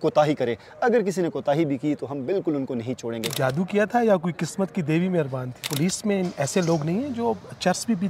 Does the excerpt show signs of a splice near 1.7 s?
no; 2 cuts; at 3.3 s, 5.7 s

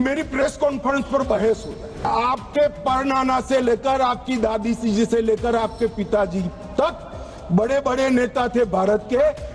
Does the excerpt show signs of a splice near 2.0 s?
yes; 1 cut; at 2.0 s

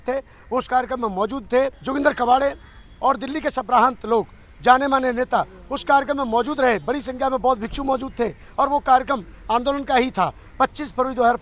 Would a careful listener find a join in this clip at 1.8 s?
yes; 1 cut; at 1.8 s

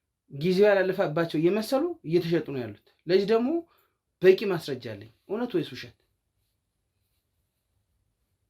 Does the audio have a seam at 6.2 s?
no; 0 cuts

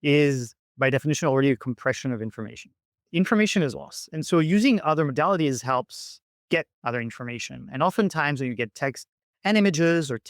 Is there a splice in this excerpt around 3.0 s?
yes; 1 cut; at 3.0 s

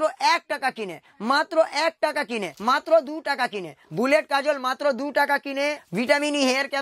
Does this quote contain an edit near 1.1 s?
yes; 4 cuts; at 1.1 s, 2.5 s, 3.8 s, 5.8 s

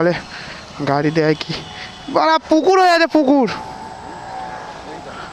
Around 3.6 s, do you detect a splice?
yes; 1 cut; at 3.6 s

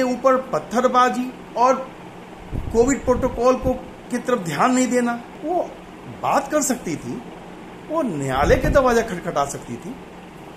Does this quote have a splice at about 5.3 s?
yes; 3 cuts; at 1.4 s, 3.9 s, 5.3 s

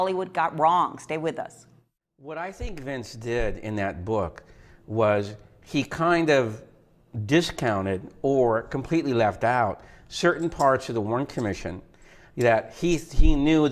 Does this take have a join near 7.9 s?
yes; 1 cut; at 7.9 s

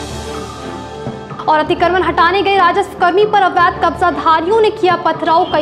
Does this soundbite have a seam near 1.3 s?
yes; 1 cut; at 1.3 s

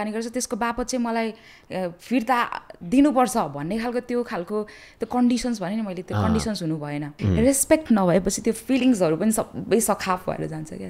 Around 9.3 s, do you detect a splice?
no; 1 cut; at 7.2 s

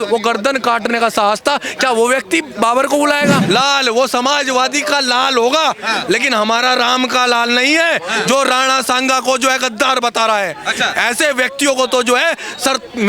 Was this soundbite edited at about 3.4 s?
yes; 1 cut; at 3.4 s

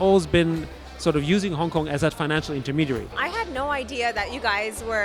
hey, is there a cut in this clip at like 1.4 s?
no; 1 cut; at 3.2 s

